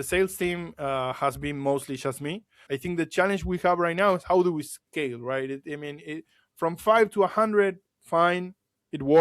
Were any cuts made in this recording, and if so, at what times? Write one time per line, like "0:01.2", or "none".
0:02.5